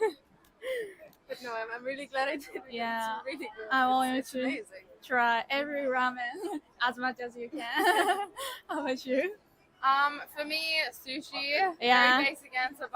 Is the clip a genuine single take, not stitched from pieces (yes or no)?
yes